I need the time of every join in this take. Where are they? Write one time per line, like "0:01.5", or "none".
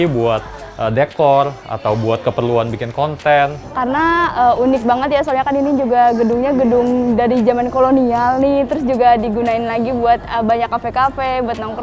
0:03.6

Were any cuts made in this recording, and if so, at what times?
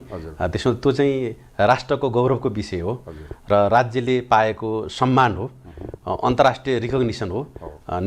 none

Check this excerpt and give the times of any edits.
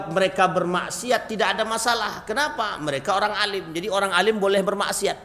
none

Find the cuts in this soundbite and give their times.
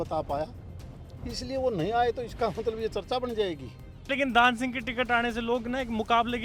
0:04.1

